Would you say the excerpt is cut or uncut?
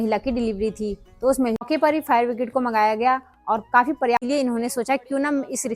cut